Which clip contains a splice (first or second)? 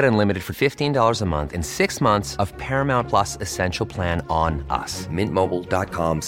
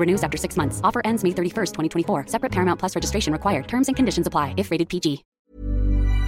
second